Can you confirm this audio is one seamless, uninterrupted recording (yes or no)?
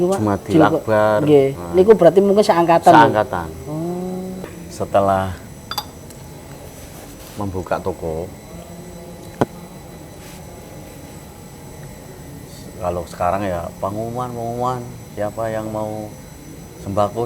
no